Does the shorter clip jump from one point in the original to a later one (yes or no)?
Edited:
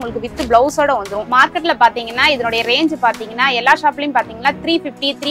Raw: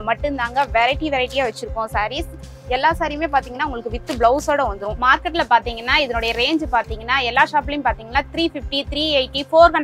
no